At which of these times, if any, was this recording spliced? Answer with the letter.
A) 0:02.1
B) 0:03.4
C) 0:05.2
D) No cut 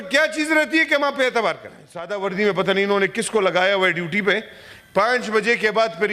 A